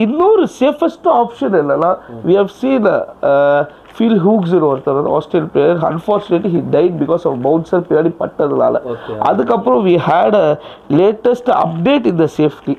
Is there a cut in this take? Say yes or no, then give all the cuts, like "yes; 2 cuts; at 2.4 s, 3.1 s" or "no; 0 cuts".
no; 0 cuts